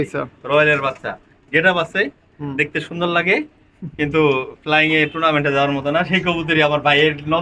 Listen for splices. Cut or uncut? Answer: uncut